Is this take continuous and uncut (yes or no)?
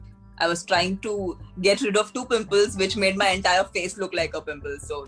yes